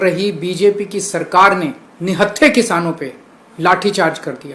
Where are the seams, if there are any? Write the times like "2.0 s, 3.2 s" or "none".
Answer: 1.9 s

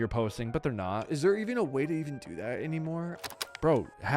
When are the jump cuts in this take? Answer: 1.0 s, 3.3 s

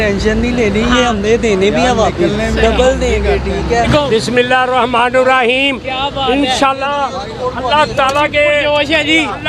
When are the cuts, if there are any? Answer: 3.9 s

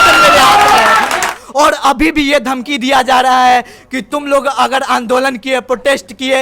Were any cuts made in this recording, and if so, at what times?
1.4 s

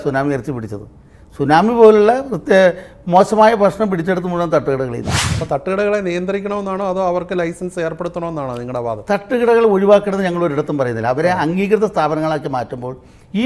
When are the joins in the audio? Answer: 5.2 s

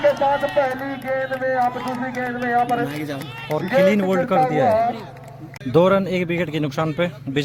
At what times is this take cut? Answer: none

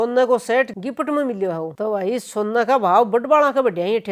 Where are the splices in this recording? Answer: none

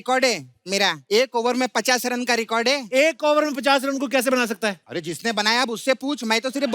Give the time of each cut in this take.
1.0 s, 4.8 s

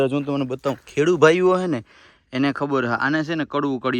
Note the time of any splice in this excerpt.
none

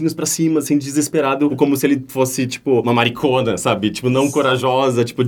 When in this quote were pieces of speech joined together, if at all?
none

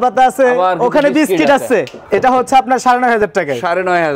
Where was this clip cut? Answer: 2.0 s

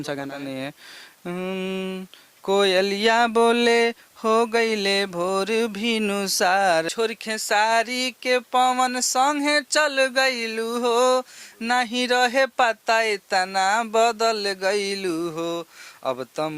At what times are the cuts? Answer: 6.9 s

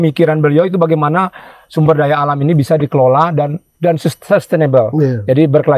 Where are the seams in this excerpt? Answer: none

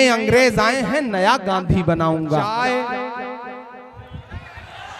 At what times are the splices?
2.5 s

